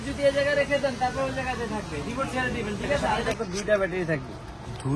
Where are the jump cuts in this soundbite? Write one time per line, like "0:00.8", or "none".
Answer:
0:03.2